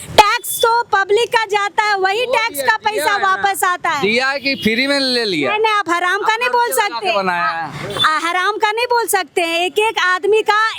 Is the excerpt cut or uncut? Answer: uncut